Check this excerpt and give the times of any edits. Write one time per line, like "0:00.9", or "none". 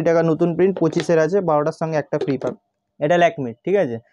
0:02.5

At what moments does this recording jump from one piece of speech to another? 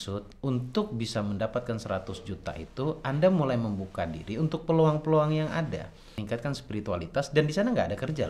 0:06.1

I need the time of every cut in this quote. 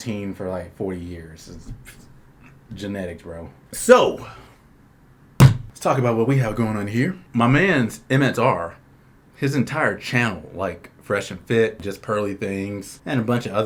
none

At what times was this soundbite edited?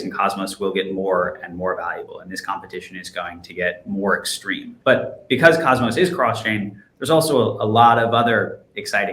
0:04.7

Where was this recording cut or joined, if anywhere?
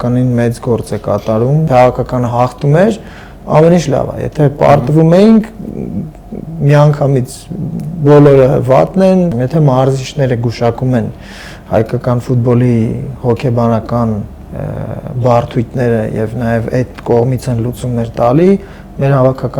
0:01.7
0:09.3

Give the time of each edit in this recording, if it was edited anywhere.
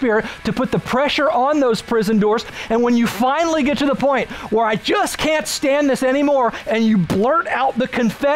0:02.5

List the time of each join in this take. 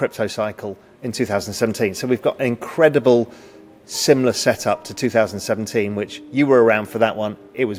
none

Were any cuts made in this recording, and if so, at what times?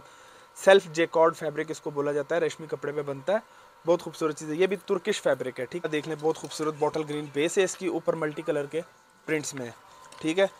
0:05.8

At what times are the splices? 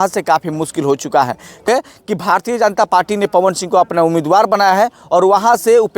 0:01.6

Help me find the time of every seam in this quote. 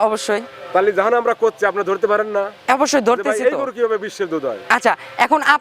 none

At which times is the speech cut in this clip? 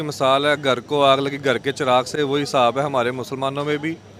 none

